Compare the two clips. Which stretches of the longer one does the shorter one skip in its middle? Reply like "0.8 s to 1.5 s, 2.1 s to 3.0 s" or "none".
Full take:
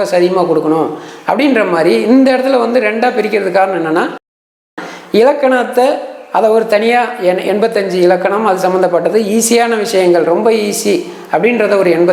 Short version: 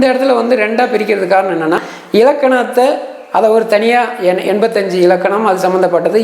4.2 s to 4.9 s